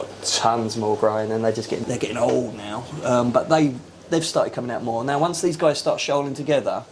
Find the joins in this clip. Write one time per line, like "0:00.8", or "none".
0:01.8